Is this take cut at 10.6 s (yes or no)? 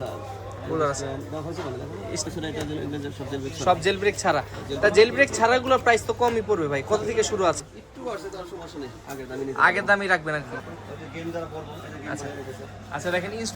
yes